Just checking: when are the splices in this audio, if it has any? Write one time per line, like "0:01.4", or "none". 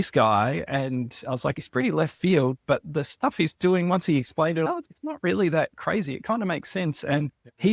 0:01.6
0:04.7